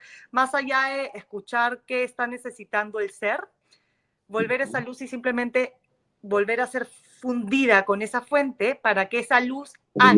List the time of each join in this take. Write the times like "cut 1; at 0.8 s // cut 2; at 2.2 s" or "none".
none